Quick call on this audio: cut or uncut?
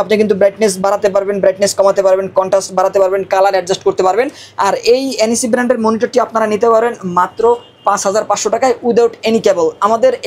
uncut